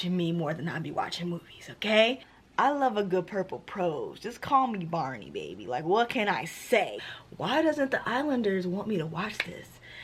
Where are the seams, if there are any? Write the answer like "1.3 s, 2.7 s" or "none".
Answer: 2.3 s, 7.0 s